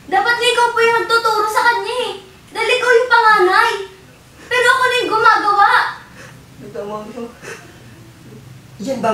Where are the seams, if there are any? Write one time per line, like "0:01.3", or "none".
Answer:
none